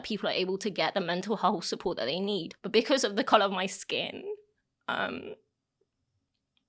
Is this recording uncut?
no; 1 cut; at 2.5 s

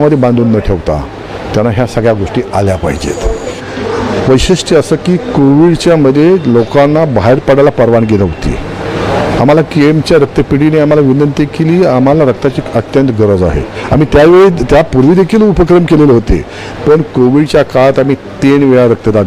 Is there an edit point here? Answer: yes; 1 cut; at 3.6 s

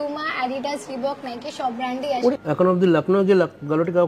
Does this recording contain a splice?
yes; 1 cut; at 2.3 s

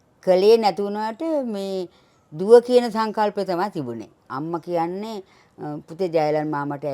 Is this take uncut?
no; 1 cut; at 4.2 s

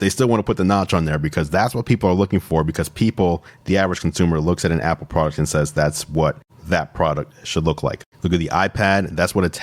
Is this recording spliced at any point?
no; 0 cuts

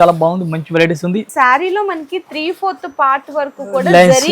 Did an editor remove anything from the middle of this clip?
yes; 1 cut; at 1.3 s

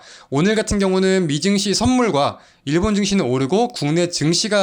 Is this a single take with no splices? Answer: yes; 0 cuts

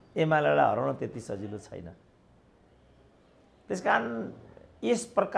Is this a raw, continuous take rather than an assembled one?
yes; 0 cuts

